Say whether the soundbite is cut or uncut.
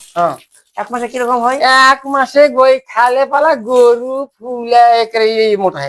uncut